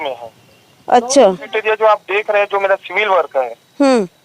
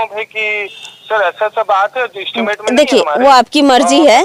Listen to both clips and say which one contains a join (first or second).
first